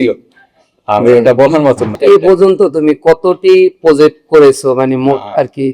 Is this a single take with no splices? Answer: no; 1 cut; at 1.9 s

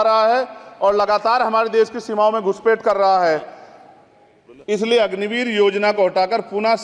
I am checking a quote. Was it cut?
no; 0 cuts

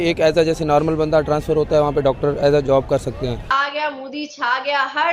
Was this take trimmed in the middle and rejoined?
yes; 1 cut; at 3.5 s

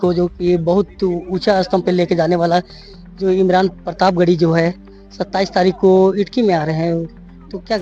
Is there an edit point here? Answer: no; 0 cuts

